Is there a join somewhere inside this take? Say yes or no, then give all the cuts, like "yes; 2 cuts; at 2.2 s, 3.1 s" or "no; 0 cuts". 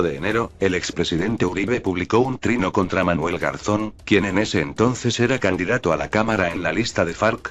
yes; 1 cut; at 2.9 s